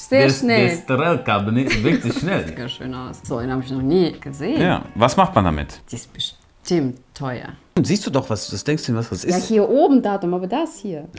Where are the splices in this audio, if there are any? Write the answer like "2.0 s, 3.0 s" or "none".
2.6 s, 7.8 s